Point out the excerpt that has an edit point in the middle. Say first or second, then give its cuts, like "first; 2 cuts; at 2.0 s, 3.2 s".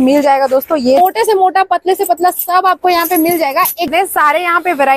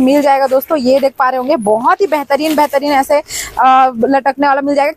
first; 2 cuts; at 1.0 s, 3.9 s